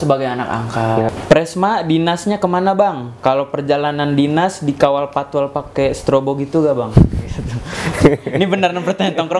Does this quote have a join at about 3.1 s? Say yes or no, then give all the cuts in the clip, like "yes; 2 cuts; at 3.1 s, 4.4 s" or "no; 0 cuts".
no; 1 cut; at 1.1 s